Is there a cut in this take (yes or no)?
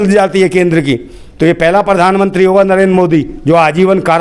no